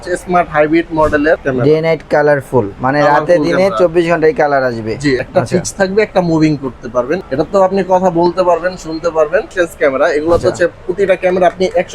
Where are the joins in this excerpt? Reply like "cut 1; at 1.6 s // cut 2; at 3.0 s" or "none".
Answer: cut 1; at 1.4 s // cut 2; at 5.2 s // cut 3; at 7.2 s // cut 4; at 9.5 s

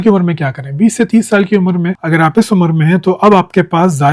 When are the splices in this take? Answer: none

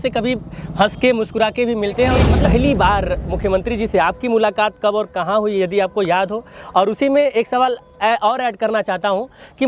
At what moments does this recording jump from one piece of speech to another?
cut 1; at 2.4 s

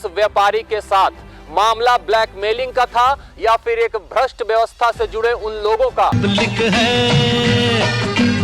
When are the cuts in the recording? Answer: cut 1; at 6.2 s

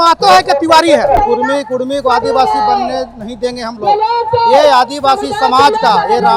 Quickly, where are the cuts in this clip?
cut 1; at 1.2 s

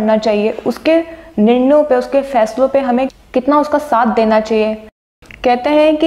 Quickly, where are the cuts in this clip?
cut 1; at 5.0 s

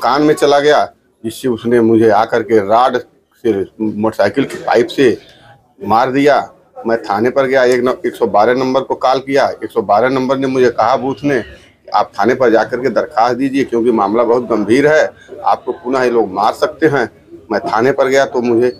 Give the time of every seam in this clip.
none

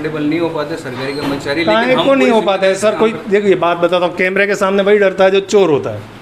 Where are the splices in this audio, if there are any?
none

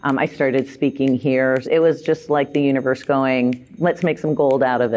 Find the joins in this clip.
cut 1; at 1.6 s // cut 2; at 3.7 s

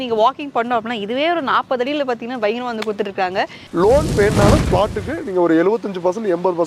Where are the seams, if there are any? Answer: cut 1; at 3.7 s

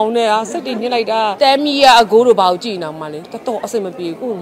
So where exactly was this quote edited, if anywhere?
cut 1; at 1.3 s

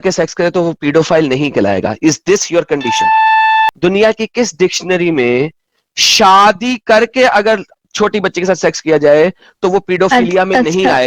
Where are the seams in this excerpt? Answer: cut 1; at 3.7 s

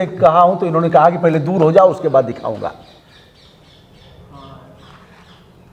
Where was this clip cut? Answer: none

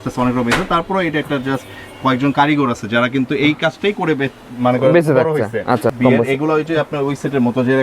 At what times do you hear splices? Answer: cut 1; at 5.9 s

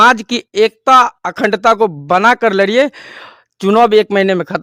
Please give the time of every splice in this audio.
none

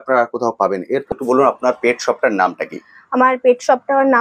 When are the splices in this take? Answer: cut 1; at 1.1 s

